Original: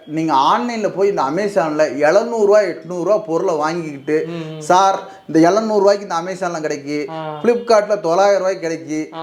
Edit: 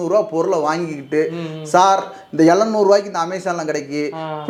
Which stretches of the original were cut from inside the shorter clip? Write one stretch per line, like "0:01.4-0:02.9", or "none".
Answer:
none